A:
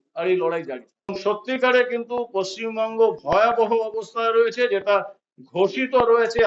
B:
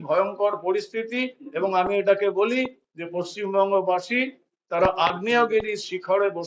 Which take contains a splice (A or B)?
A